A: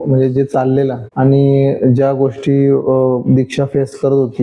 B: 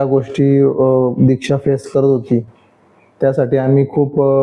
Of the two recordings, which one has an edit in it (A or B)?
A